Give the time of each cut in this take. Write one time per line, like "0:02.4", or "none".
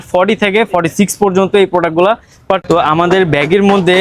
0:02.6